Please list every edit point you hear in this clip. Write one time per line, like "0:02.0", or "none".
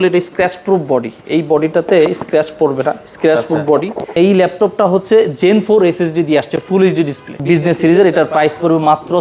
0:04.1
0:07.3